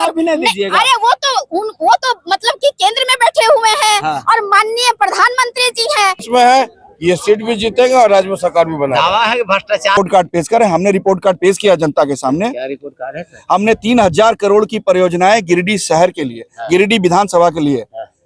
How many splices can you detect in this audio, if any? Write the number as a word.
two